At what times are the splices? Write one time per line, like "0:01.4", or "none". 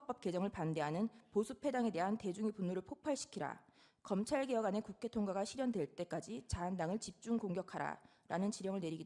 none